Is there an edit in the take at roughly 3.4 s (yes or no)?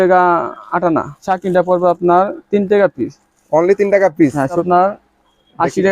no